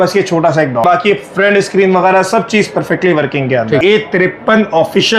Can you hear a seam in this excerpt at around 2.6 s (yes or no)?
no